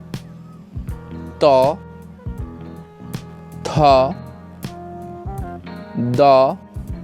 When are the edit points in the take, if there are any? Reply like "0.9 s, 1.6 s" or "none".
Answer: 2.3 s, 3.6 s